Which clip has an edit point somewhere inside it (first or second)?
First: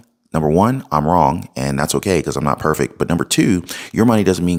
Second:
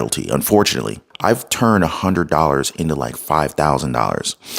second